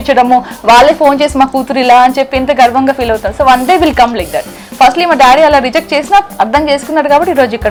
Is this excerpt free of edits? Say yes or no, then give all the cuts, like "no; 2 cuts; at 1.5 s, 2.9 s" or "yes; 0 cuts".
yes; 0 cuts